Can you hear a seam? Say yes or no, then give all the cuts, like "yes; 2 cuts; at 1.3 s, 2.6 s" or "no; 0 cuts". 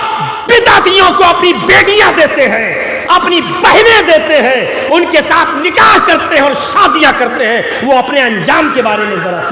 no; 0 cuts